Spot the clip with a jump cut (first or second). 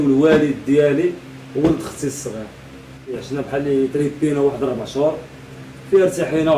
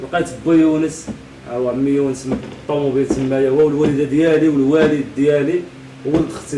first